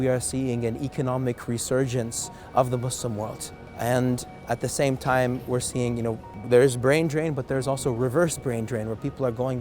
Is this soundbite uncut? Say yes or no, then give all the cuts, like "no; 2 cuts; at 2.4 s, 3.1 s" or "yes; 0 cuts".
yes; 0 cuts